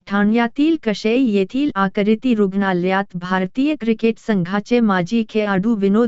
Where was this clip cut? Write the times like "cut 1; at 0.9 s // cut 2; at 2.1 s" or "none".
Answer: none